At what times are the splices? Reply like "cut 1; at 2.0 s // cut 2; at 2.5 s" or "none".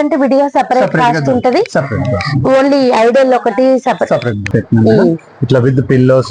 cut 1; at 4.4 s